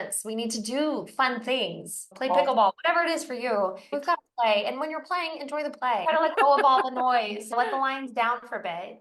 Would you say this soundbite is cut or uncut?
cut